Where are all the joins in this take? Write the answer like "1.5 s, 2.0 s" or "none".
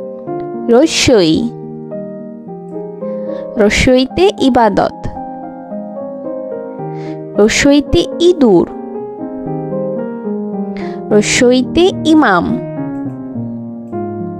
none

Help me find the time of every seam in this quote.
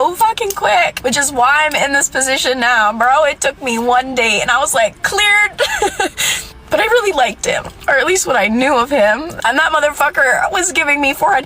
9.2 s

